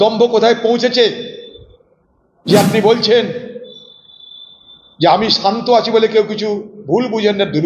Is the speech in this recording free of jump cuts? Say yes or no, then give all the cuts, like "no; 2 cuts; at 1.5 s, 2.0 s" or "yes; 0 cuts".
yes; 0 cuts